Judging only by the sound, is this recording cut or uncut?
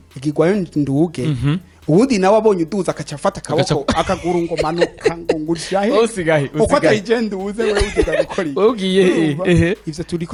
uncut